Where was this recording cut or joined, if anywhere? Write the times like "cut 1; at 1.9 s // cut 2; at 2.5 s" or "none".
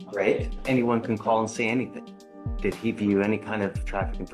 none